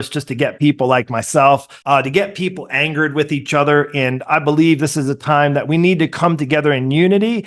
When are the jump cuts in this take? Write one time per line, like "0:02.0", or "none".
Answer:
0:01.7